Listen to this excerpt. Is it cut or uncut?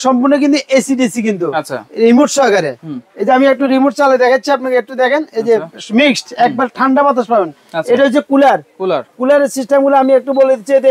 uncut